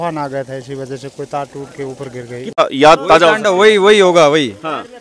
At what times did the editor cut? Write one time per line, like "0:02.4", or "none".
0:02.6